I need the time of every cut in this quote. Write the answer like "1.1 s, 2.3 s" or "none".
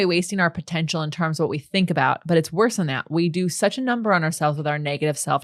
none